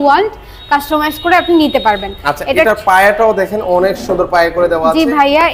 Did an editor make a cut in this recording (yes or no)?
no